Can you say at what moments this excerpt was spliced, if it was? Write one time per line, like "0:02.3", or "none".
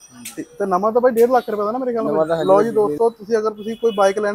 0:02.4